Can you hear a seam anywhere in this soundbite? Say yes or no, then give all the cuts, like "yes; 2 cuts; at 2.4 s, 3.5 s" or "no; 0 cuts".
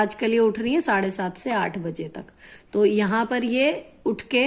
no; 0 cuts